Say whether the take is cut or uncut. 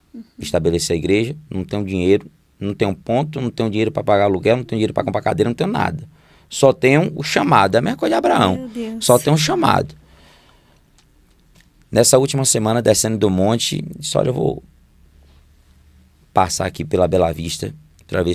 uncut